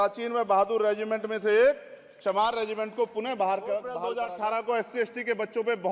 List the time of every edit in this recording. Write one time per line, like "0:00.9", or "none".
0:04.0